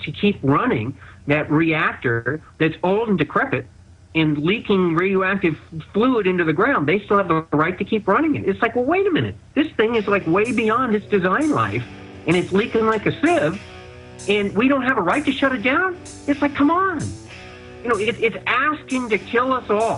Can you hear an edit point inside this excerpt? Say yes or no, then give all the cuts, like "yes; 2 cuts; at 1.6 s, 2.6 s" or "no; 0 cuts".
yes; 1 cut; at 15.0 s